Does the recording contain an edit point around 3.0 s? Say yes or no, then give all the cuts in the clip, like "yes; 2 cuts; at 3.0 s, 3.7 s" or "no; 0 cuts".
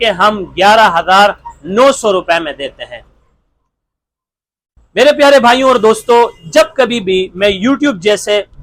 no; 0 cuts